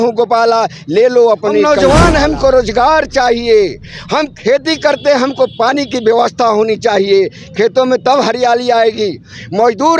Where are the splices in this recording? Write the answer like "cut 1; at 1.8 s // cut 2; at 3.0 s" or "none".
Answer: cut 1; at 1.7 s